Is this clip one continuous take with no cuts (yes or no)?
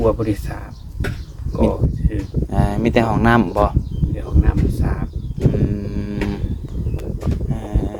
yes